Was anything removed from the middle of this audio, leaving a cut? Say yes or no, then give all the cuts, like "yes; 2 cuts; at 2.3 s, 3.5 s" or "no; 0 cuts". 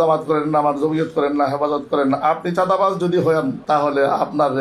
yes; 1 cut; at 3.6 s